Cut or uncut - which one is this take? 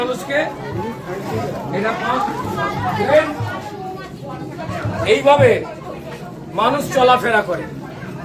uncut